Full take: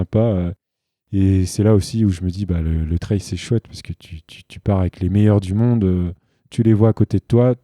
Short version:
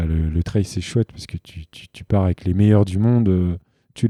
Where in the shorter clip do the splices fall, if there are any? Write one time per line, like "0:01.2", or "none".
none